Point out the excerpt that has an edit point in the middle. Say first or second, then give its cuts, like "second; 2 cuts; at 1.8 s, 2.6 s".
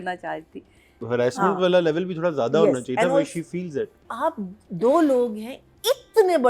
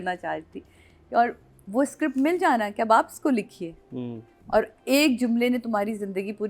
first; 2 cuts; at 1.0 s, 4.0 s